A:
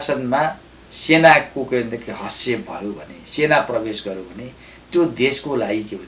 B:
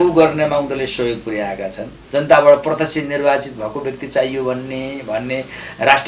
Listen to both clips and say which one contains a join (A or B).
B